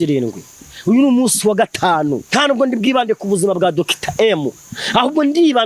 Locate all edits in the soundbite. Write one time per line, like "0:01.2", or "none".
0:02.2